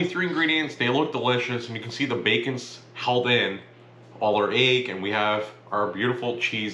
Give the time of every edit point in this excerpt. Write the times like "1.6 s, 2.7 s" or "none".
none